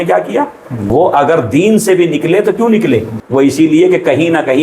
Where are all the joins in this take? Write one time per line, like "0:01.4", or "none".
0:00.9
0:03.1